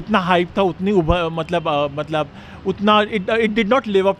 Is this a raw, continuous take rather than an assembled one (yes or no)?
yes